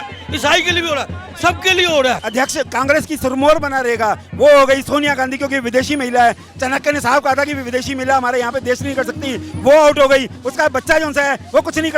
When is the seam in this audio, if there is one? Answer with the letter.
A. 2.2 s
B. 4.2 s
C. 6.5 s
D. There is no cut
A